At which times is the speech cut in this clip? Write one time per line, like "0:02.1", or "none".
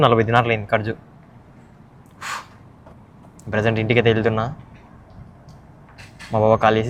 none